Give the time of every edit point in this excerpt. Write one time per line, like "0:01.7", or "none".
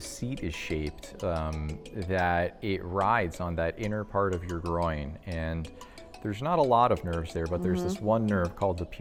none